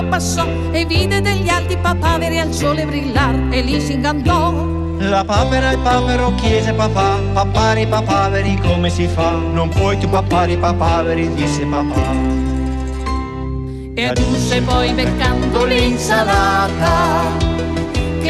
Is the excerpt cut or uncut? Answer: uncut